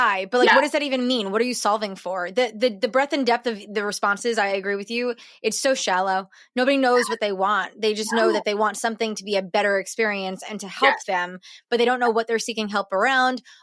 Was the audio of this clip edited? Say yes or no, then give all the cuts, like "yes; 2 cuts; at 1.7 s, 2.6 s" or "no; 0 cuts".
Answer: no; 0 cuts